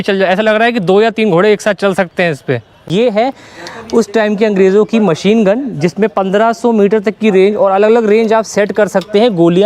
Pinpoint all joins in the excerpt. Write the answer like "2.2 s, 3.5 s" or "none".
2.9 s